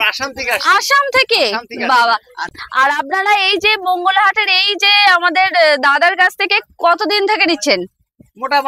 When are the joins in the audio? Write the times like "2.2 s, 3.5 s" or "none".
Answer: 2.4 s